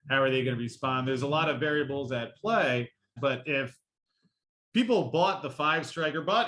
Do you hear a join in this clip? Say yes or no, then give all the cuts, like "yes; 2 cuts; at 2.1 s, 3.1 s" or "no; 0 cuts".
yes; 1 cut; at 3.1 s